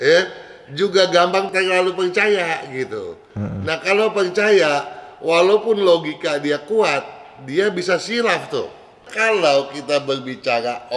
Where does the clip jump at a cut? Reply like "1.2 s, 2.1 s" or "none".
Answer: 9.1 s